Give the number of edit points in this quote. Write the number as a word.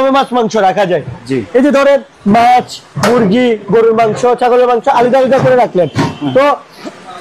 zero